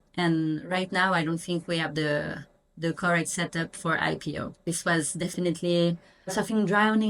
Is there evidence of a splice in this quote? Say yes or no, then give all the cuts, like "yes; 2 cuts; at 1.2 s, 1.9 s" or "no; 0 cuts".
yes; 1 cut; at 4.7 s